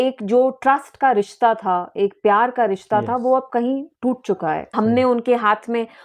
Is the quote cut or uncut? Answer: cut